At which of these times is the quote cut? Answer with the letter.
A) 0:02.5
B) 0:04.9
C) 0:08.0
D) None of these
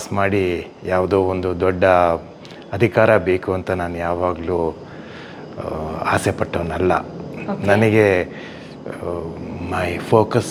D